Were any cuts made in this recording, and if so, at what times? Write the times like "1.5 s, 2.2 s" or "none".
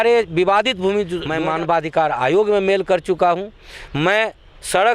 1.2 s